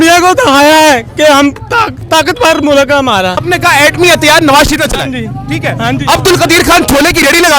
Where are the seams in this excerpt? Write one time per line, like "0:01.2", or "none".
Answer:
0:01.9
0:03.4